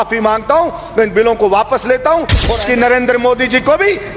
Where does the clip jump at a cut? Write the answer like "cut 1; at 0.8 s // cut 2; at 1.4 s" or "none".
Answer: cut 1; at 2.5 s